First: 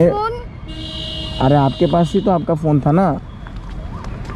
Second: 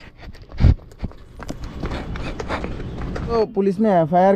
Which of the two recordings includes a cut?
second; 1 cut; at 3.4 s

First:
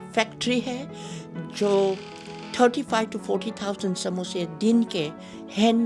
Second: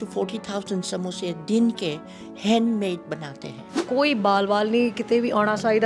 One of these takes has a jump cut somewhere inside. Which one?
second; 1 cut; at 3.7 s

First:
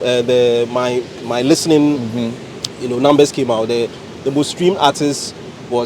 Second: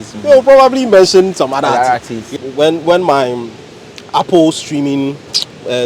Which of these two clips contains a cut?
second; 1 cut; at 2.3 s

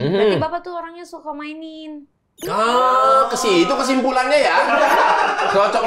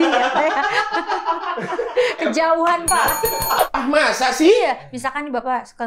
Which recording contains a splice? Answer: second; 1 cut; at 3.6 s

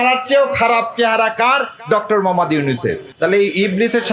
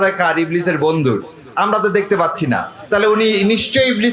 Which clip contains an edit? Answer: first; 1 cut; at 3.1 s

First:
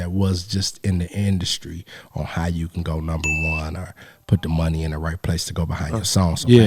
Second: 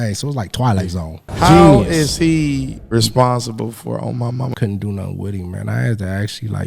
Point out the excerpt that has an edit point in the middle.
second; 3 cuts; at 1.3 s, 2.8 s, 4.5 s

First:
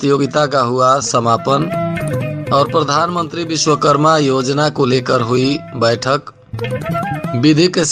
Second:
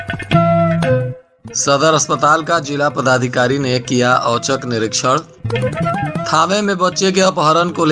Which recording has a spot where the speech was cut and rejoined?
second; 1 cut; at 1.2 s

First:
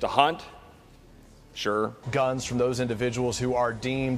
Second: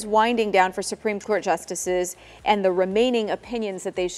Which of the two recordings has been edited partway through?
first; 1 cut; at 2.0 s

